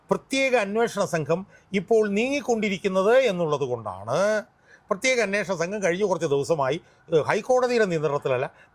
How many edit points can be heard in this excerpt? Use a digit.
0